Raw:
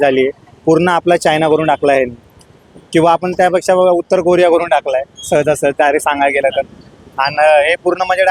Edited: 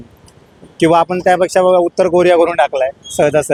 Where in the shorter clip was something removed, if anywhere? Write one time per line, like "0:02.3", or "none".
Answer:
none